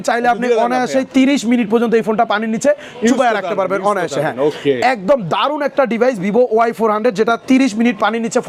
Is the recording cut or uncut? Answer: uncut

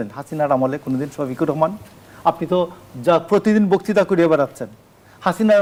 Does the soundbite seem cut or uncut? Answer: uncut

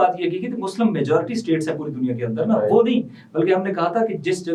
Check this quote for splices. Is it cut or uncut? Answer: uncut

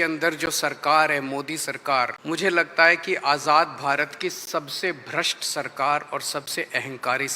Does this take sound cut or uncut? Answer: cut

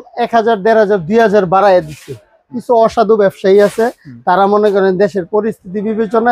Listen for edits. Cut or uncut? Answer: uncut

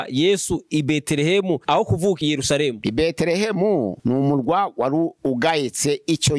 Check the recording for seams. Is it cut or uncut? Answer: uncut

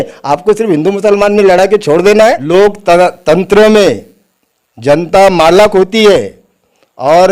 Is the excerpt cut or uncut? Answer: cut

